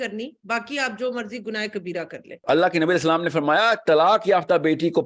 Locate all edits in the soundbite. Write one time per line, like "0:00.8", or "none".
0:02.4